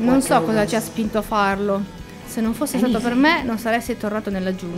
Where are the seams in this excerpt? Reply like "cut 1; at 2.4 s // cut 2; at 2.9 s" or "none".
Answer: cut 1; at 2.2 s